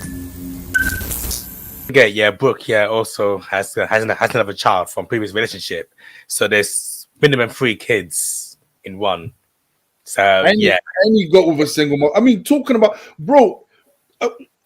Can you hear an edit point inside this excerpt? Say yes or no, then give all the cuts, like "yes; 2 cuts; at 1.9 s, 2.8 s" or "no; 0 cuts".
yes; 1 cut; at 1.9 s